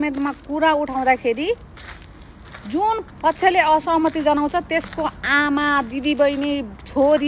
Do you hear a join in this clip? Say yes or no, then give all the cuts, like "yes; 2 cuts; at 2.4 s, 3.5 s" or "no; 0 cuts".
no; 0 cuts